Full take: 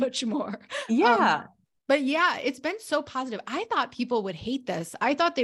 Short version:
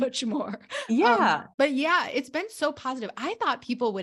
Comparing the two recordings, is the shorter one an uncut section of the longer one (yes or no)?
no